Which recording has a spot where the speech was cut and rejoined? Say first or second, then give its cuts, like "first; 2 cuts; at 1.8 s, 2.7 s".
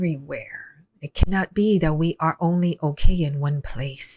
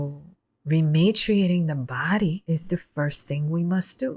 second; 1 cut; at 2.4 s